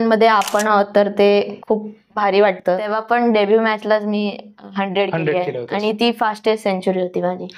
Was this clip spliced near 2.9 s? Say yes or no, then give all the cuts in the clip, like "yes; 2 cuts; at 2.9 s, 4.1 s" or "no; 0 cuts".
yes; 1 cut; at 2.9 s